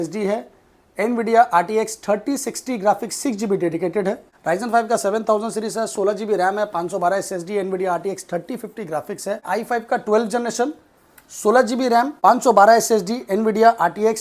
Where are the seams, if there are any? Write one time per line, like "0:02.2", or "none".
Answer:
0:04.3
0:09.4
0:12.1